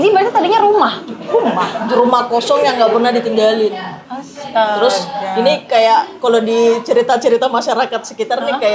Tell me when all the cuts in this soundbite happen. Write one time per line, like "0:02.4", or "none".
none